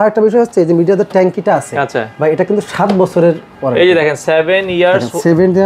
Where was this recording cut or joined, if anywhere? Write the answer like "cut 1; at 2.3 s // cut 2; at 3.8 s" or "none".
none